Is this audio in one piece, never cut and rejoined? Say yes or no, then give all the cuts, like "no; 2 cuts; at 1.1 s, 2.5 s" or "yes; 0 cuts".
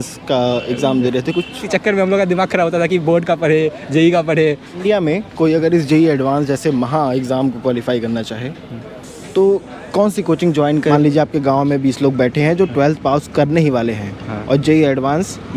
no; 3 cuts; at 1.6 s, 4.8 s, 10.9 s